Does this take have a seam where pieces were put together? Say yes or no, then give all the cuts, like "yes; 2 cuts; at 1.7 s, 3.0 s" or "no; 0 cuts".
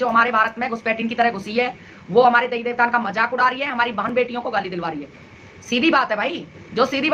no; 0 cuts